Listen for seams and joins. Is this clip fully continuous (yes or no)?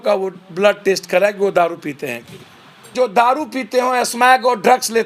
no